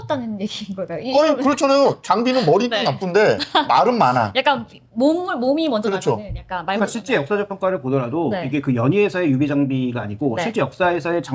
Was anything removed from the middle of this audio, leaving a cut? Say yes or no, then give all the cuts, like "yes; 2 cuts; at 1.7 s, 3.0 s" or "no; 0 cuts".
no; 0 cuts